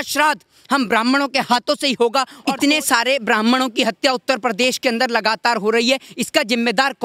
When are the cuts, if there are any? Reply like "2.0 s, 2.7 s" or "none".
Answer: 2.4 s